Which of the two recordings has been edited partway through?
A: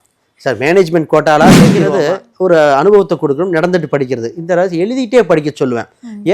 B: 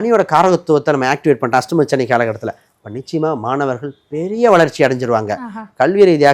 A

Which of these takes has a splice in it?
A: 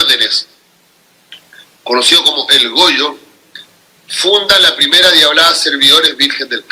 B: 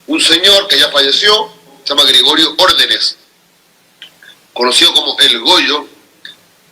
B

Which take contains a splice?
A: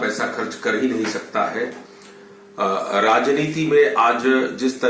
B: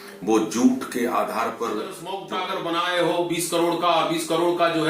B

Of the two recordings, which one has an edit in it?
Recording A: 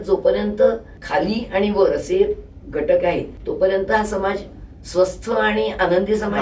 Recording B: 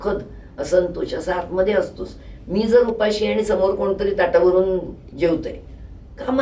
A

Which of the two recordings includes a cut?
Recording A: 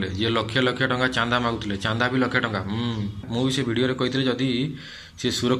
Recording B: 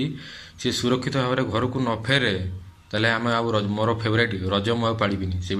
A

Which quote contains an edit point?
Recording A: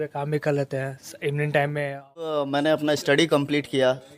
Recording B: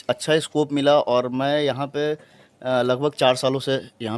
A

